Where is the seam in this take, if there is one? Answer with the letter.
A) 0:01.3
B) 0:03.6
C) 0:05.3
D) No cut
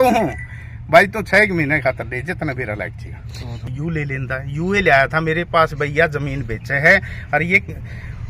B